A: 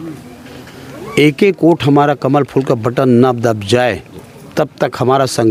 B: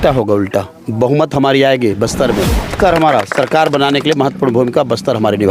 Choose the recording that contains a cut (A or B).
B